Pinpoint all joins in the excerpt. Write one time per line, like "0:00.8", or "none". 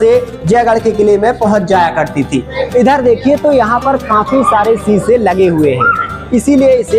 0:02.6